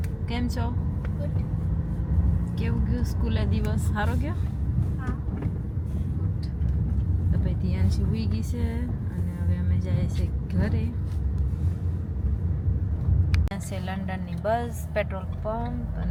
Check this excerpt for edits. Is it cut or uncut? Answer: uncut